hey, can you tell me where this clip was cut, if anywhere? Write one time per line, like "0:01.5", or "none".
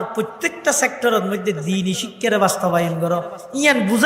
none